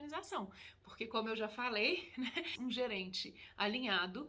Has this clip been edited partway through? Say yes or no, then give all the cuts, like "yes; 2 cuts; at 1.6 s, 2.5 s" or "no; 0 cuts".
yes; 1 cut; at 2.5 s